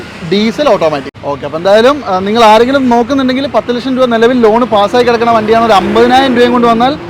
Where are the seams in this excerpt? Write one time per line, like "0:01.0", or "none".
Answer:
0:01.1